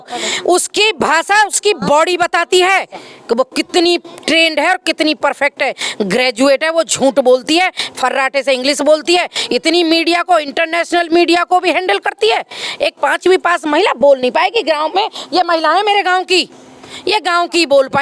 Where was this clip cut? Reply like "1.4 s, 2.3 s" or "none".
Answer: none